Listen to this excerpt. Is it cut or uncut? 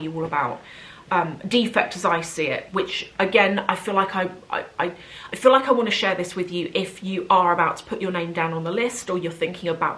uncut